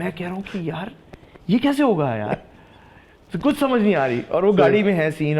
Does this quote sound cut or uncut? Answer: uncut